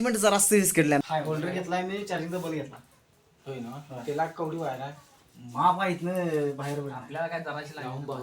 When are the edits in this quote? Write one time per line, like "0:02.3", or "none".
0:01.0